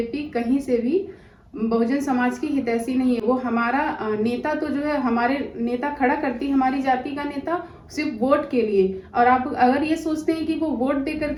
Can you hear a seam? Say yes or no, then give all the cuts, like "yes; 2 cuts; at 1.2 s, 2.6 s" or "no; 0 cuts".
no; 0 cuts